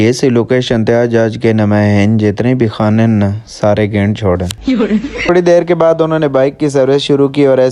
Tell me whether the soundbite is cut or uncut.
cut